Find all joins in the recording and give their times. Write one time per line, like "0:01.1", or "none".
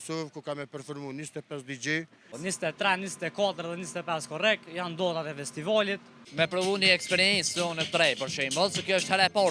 0:02.3
0:06.2